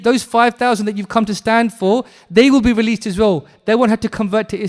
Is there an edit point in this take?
no; 0 cuts

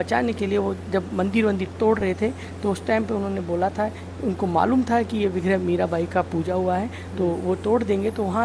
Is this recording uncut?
yes; 0 cuts

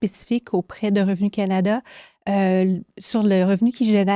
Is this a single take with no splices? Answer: yes; 0 cuts

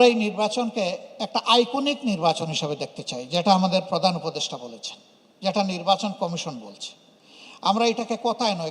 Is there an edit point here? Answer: no; 0 cuts

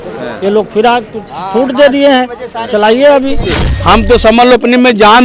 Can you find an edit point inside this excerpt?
yes; 1 cut; at 3.7 s

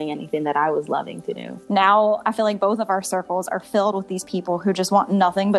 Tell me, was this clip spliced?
yes; 1 cut; at 1.5 s

